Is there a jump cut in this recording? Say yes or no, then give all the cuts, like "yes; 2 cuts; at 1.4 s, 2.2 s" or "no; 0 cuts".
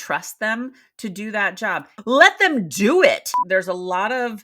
yes; 2 cuts; at 1.9 s, 3.3 s